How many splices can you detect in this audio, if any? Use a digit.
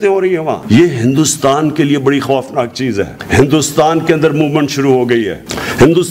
1